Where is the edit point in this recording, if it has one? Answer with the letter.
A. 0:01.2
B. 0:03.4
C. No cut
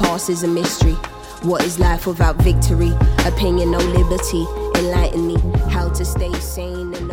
C